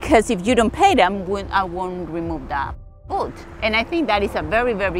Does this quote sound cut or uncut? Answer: uncut